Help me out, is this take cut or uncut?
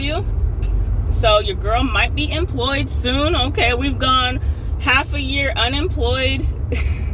uncut